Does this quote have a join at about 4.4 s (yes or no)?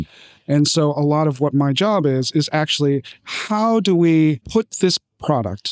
yes